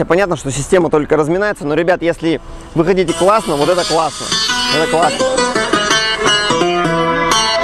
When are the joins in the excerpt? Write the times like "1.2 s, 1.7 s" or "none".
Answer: none